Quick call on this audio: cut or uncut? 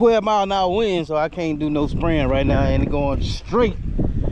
uncut